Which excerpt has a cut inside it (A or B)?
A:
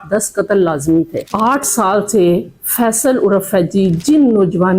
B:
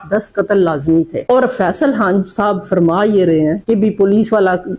A